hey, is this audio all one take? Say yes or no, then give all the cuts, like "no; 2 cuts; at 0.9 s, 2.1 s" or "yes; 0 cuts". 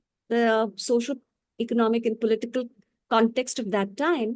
yes; 0 cuts